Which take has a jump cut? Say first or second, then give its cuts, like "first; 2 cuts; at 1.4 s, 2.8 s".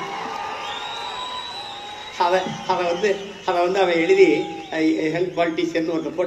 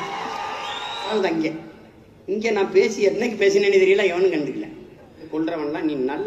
second; 2 cuts; at 1.1 s, 5.2 s